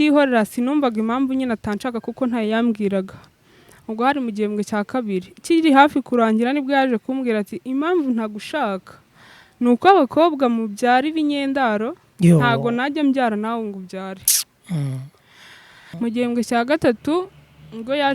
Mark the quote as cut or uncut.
cut